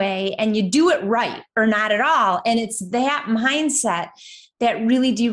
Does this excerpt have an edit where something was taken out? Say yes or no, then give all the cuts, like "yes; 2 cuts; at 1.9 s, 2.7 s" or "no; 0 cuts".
no; 0 cuts